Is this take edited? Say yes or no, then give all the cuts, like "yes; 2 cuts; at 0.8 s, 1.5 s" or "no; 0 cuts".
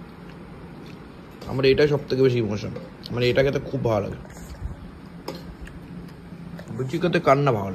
no; 0 cuts